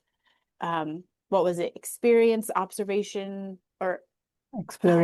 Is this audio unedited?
yes; 0 cuts

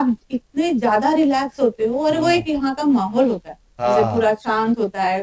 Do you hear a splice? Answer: no; 0 cuts

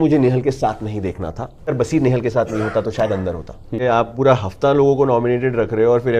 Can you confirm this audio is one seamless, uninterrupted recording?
no; 2 cuts; at 1.6 s, 3.8 s

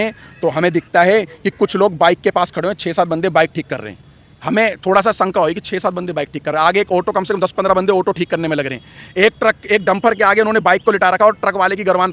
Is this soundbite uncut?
yes; 0 cuts

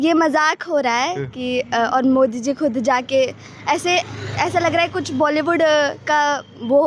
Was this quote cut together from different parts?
no; 0 cuts

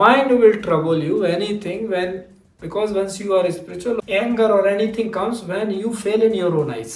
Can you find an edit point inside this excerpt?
yes; 1 cut; at 4.0 s

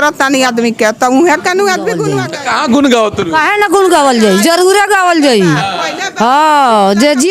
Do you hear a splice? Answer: yes; 1 cut; at 2.2 s

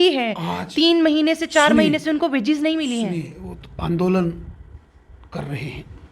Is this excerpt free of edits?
yes; 0 cuts

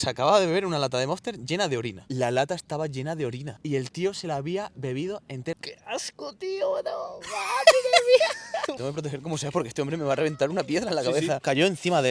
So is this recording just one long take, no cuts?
no; 4 cuts; at 2.0 s, 5.5 s, 8.8 s, 11.4 s

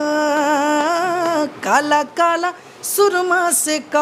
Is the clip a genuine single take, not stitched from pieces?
yes; 0 cuts

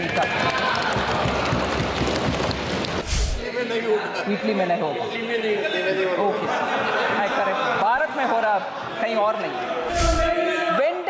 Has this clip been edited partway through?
yes; 2 cuts; at 3.0 s, 9.9 s

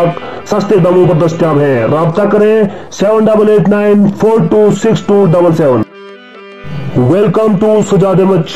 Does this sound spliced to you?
no; 0 cuts

